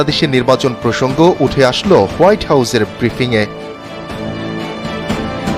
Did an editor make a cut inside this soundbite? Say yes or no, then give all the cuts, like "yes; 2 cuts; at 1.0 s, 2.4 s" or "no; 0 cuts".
no; 0 cuts